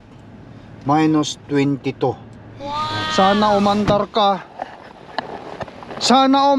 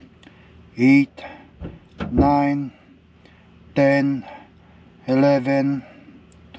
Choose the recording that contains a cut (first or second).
first